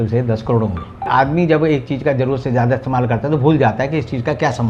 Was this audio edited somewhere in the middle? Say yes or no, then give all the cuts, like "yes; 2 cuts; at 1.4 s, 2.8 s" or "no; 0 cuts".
yes; 1 cut; at 1.1 s